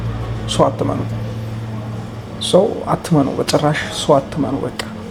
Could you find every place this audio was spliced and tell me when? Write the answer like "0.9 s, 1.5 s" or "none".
none